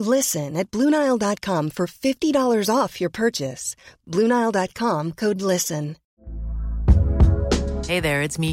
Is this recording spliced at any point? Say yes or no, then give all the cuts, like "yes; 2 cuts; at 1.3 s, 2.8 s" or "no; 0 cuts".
yes; 1 cut; at 6.0 s